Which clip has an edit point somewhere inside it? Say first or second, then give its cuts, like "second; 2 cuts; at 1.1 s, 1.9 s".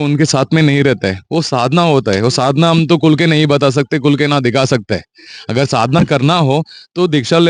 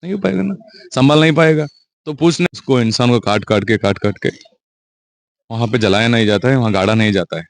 second; 1 cut; at 2.5 s